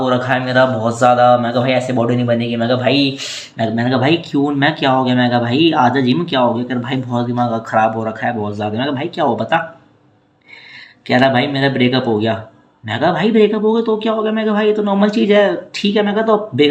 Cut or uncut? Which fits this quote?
uncut